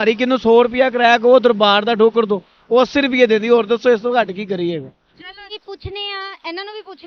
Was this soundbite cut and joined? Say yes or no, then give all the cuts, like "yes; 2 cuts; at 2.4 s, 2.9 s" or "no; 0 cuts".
yes; 1 cut; at 5.6 s